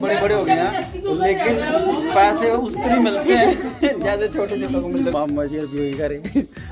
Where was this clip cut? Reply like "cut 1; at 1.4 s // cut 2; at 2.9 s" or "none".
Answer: cut 1; at 5.1 s